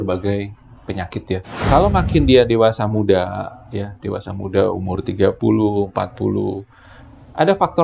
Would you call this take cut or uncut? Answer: cut